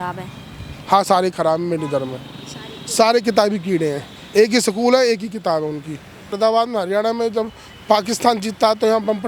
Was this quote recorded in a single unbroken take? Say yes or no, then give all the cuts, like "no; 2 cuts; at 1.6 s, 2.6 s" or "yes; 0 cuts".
no; 1 cut; at 6.3 s